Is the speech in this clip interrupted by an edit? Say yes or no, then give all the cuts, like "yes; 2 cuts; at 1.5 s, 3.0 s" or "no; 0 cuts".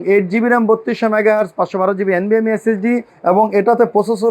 yes; 1 cut; at 3.1 s